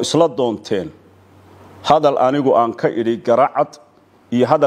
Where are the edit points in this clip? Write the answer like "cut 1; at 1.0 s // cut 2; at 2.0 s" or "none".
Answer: none

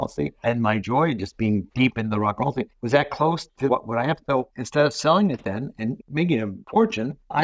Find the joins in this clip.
cut 1; at 1.7 s // cut 2; at 2.8 s // cut 3; at 3.9 s

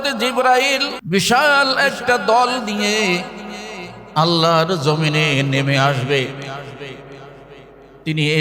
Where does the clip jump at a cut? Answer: cut 1; at 0.9 s

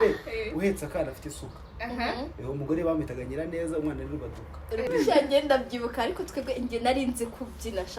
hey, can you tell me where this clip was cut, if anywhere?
cut 1; at 4.9 s

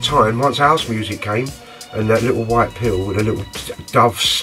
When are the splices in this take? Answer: none

